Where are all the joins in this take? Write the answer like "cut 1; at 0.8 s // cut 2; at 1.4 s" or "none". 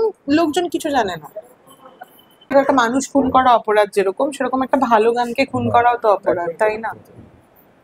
cut 1; at 2.5 s